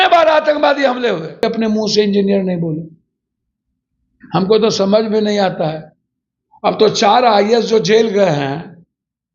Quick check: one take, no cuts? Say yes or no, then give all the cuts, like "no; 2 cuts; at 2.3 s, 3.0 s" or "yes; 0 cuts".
no; 1 cut; at 1.4 s